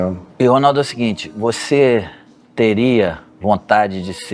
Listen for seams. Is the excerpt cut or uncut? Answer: uncut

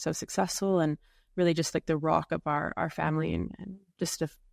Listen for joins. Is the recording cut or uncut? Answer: uncut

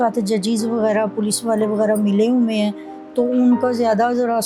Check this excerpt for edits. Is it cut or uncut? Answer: uncut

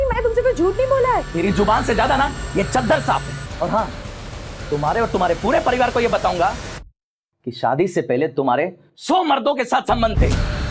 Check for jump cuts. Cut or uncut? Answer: cut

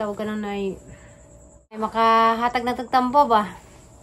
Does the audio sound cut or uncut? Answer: cut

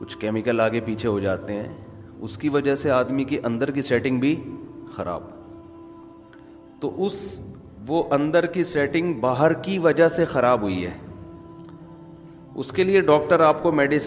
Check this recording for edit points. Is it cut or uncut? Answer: cut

